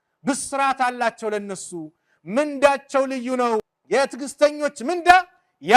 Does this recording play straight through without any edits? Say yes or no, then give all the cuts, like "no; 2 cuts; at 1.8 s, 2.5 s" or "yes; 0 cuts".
no; 1 cut; at 3.7 s